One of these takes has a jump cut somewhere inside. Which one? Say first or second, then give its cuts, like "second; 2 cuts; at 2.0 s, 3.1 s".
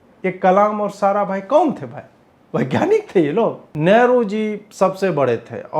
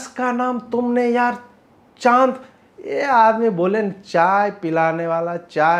first; 1 cut; at 3.7 s